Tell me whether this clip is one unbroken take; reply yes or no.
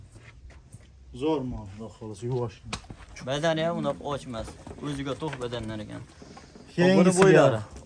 yes